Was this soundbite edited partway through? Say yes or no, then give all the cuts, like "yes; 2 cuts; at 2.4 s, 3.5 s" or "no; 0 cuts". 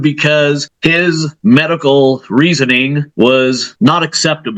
yes; 3 cuts; at 1.0 s, 3.0 s, 3.7 s